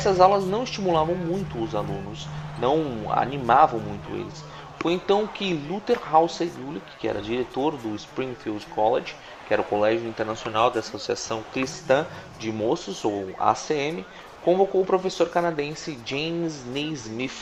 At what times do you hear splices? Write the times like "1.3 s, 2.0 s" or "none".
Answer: none